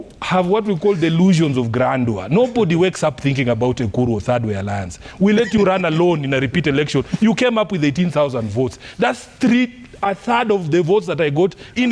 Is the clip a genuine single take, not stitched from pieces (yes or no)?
yes